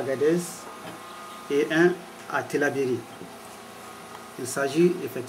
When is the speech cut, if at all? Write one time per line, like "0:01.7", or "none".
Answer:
none

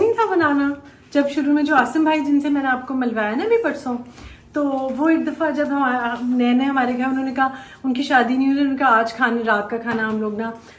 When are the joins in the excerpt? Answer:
none

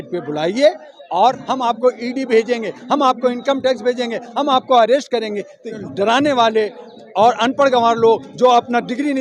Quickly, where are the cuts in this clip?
0:01.4
0:05.7

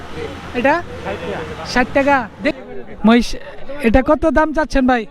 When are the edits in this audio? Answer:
0:02.5

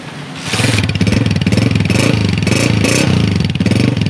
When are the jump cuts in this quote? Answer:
none

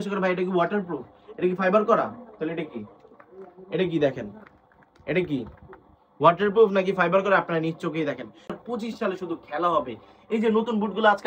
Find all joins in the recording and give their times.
0:08.5

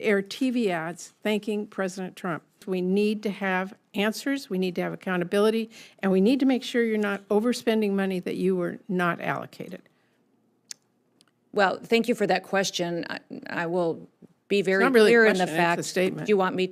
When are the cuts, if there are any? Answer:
0:02.6

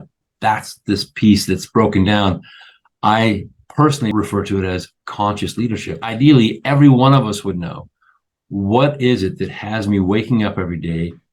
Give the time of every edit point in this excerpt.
0:04.1
0:06.1

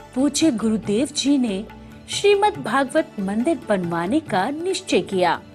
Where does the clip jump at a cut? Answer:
none

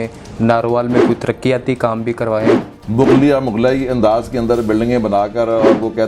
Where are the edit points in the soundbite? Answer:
0:02.6

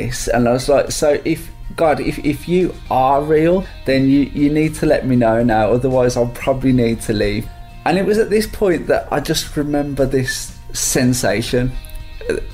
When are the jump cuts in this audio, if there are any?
0:03.7
0:07.4

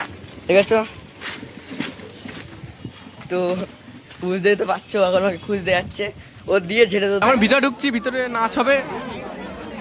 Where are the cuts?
0:07.2

